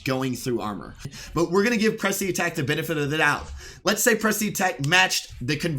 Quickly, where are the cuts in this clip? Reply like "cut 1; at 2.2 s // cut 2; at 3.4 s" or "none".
cut 1; at 1.2 s